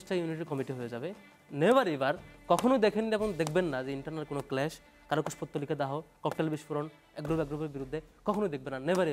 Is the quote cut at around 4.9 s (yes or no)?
no